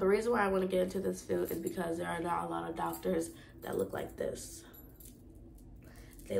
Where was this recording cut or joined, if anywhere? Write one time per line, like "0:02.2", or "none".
none